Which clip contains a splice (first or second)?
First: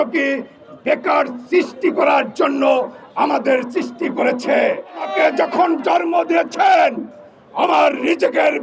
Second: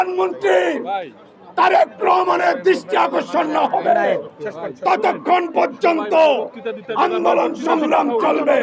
first